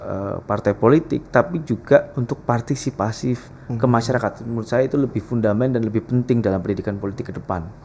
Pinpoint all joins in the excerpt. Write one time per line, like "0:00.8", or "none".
none